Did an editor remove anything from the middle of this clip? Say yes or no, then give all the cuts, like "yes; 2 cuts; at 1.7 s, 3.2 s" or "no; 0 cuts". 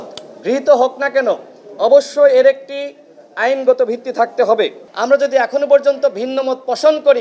yes; 1 cut; at 4.9 s